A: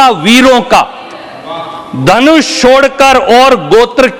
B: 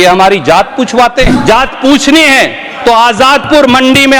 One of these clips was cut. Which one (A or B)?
B